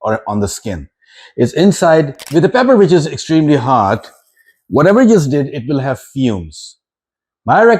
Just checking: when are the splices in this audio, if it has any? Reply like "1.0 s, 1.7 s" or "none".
2.3 s